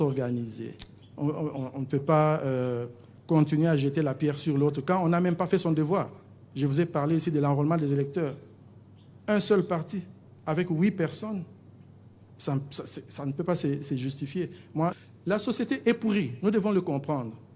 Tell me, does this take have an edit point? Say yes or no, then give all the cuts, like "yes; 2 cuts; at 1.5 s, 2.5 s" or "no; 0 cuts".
yes; 1 cut; at 14.9 s